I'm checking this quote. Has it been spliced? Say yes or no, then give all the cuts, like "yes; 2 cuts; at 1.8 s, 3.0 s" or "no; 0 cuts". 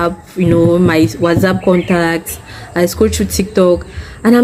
no; 0 cuts